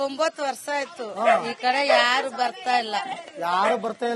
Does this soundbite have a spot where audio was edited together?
no; 0 cuts

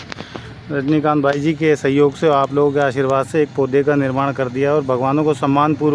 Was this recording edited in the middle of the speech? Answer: no; 0 cuts

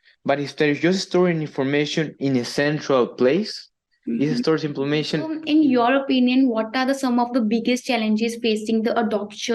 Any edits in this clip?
yes; 1 cut; at 5.4 s

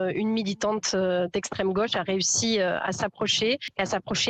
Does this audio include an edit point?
no; 0 cuts

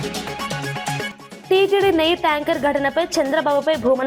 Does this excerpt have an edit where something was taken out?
yes; 1 cut; at 1.2 s

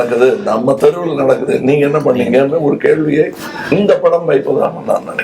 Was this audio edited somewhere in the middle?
yes; 1 cut; at 1.4 s

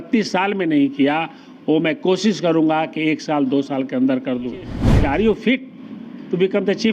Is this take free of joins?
no; 1 cut; at 4.8 s

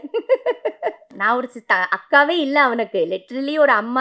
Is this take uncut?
no; 1 cut; at 1.1 s

